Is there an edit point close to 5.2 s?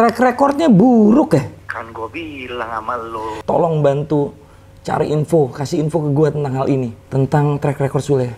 no; 3 cuts; at 1.6 s, 3.3 s, 7.0 s

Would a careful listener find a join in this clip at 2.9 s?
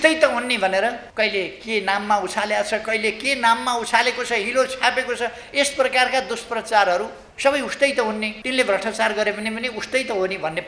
no; 3 cuts; at 1.0 s, 7.2 s, 8.4 s

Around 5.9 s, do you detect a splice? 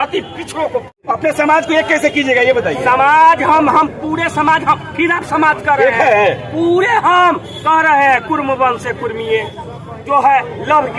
no; 1 cut; at 1.0 s

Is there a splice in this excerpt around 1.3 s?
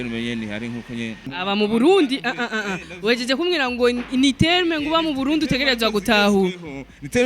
yes; 1 cut; at 1.3 s

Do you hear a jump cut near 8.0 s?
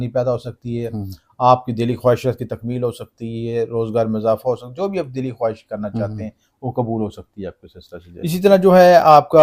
yes; 1 cut; at 8.0 s

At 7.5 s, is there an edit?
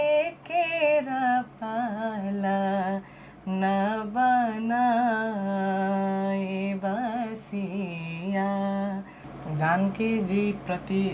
no; 1 cut; at 9.2 s

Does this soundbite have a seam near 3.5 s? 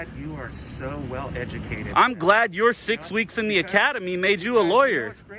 no; 0 cuts

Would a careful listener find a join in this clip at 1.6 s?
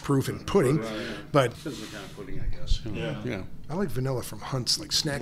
yes; 1 cut; at 1.6 s

